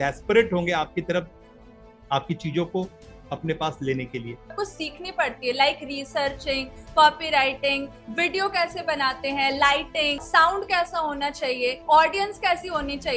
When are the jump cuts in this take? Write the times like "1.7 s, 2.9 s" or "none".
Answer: 4.5 s, 10.2 s